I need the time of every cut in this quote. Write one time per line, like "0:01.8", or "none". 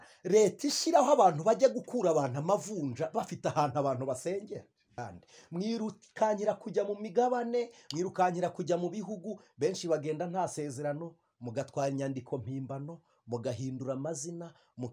0:05.0